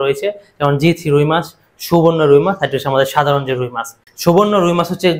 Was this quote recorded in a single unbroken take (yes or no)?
no